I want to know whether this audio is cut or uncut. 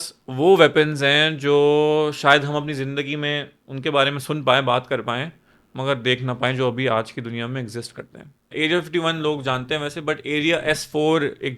cut